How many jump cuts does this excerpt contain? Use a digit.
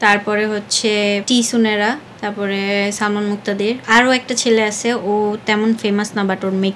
3